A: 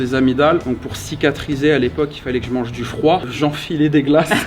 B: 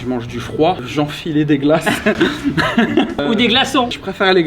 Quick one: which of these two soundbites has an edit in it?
B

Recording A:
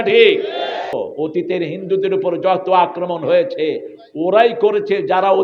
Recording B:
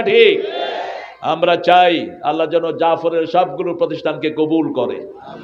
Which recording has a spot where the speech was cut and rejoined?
A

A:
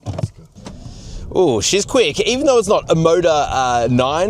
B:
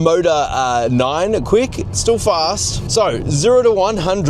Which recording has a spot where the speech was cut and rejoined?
B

